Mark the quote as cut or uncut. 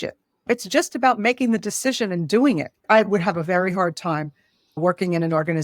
cut